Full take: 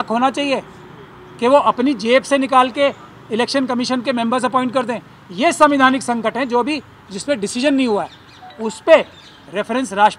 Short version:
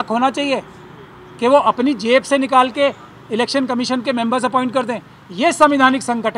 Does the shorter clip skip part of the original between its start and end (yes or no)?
no